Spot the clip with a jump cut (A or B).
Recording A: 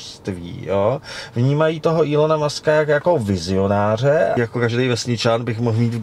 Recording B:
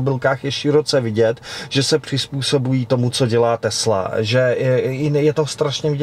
A